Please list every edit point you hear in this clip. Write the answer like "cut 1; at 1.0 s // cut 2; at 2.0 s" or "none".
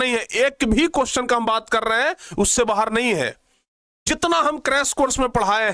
none